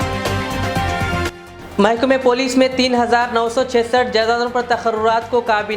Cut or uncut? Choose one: uncut